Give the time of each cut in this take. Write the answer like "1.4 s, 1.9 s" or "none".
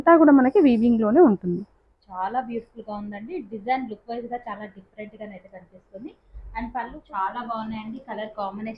6.9 s